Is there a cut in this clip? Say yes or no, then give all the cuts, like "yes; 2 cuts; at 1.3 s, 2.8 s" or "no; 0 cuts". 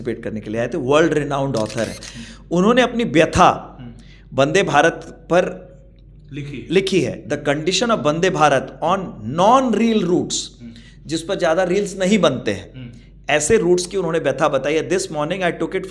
no; 0 cuts